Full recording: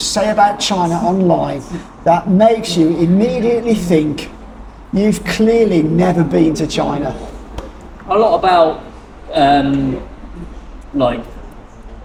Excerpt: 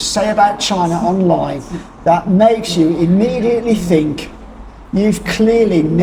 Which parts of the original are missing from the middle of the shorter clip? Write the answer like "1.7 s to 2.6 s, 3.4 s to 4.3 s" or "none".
none